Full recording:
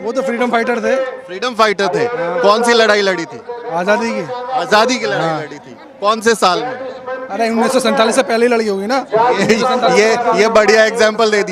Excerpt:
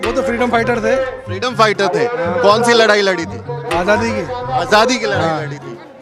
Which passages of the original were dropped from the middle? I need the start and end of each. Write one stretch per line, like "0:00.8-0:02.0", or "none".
none